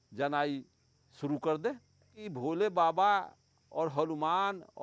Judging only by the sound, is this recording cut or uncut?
cut